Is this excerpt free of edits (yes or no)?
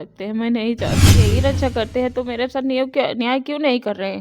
no